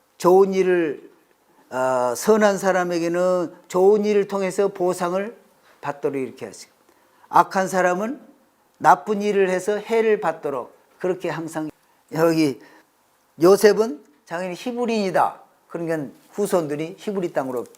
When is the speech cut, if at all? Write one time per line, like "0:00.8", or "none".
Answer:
0:11.7